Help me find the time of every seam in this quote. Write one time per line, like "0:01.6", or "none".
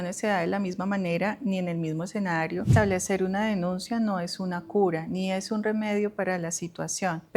0:02.7